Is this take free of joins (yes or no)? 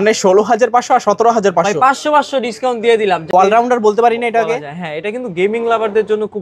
no